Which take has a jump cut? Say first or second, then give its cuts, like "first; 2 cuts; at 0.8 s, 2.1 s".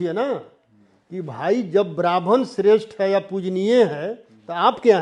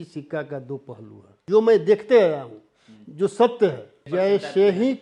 second; 2 cuts; at 1.3 s, 3.9 s